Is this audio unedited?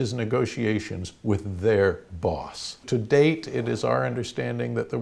no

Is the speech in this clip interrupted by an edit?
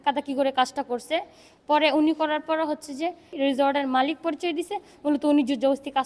yes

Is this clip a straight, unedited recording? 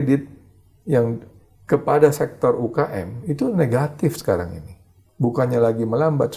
yes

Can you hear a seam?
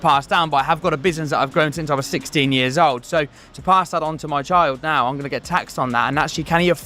no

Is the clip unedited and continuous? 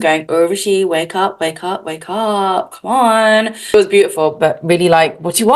no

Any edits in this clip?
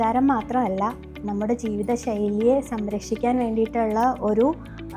no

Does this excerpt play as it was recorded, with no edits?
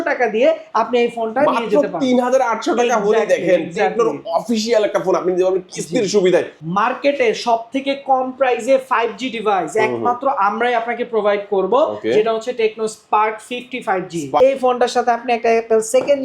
no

